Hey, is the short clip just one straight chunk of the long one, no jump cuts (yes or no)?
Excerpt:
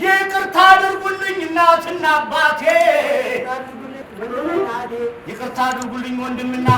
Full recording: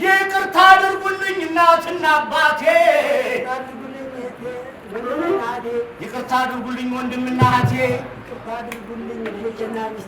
no